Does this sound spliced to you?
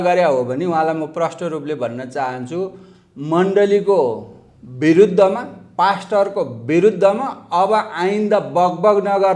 no; 0 cuts

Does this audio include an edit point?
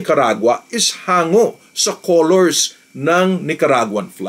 no; 0 cuts

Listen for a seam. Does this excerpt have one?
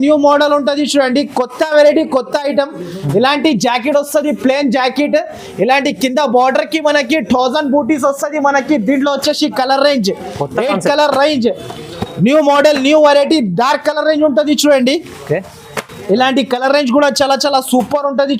no; 0 cuts

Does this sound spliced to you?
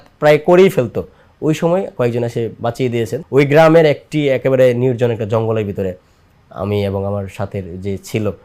yes; 1 cut; at 3.2 s

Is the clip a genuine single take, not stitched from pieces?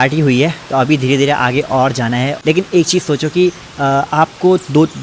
no; 1 cut; at 2.3 s

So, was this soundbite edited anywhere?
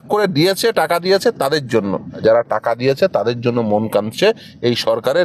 yes; 1 cut; at 2.2 s

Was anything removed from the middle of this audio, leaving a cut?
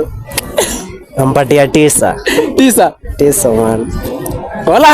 no; 0 cuts

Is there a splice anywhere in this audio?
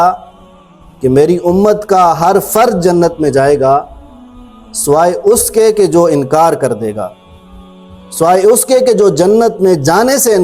no; 0 cuts

